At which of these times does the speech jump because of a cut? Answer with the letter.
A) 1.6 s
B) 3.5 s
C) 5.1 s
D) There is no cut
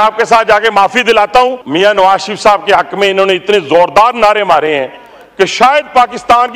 A